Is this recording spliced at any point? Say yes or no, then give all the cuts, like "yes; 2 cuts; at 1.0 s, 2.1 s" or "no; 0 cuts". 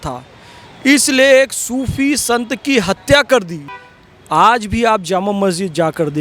no; 0 cuts